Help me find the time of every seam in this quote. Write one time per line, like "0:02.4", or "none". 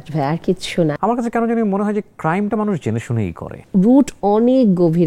0:00.9
0:03.6